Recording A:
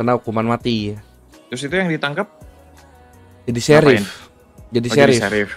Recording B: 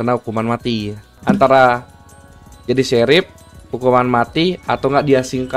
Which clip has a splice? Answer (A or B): B